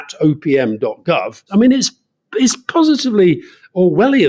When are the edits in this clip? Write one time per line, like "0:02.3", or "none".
0:01.4